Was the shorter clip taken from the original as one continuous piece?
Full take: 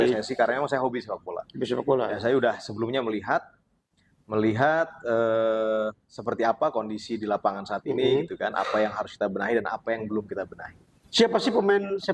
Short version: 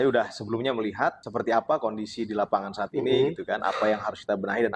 no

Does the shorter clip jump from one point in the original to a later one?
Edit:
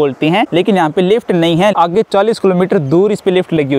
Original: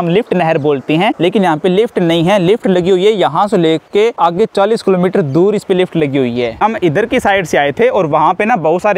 yes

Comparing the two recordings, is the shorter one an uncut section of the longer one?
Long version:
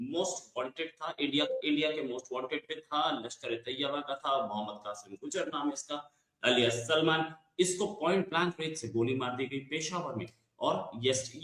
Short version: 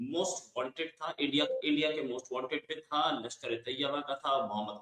yes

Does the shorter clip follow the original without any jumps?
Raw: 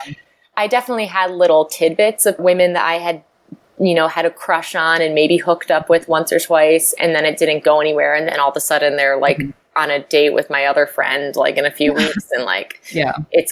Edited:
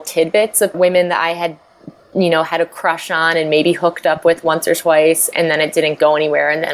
yes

